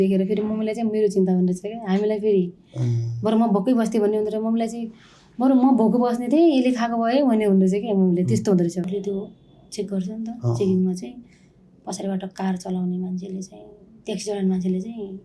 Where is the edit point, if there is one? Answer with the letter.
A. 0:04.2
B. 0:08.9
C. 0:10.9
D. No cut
B